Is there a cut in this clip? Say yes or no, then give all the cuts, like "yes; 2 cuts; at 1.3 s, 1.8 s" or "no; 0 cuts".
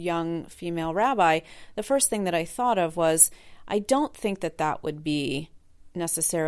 no; 0 cuts